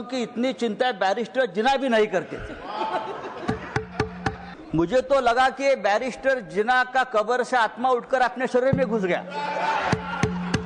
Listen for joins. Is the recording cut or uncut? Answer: cut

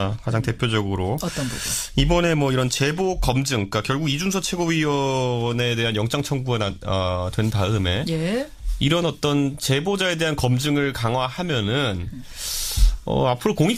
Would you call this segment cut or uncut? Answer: uncut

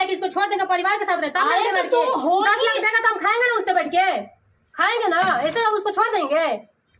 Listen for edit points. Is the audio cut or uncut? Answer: uncut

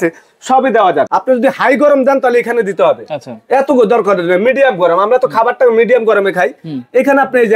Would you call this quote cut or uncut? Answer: cut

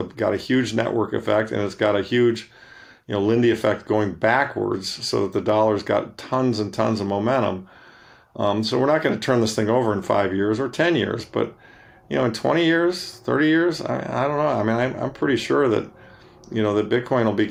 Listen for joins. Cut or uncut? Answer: uncut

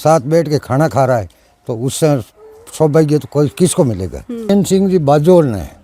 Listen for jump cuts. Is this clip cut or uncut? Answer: cut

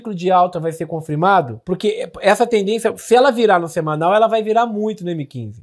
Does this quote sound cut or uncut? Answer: cut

